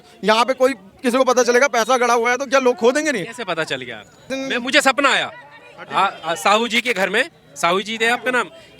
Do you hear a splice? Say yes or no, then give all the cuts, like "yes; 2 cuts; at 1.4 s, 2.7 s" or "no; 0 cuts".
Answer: yes; 1 cut; at 4.2 s